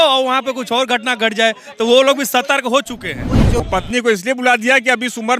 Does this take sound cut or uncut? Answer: cut